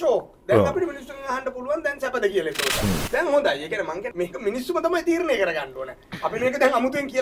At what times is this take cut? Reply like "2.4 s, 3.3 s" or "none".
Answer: 2.8 s, 4.1 s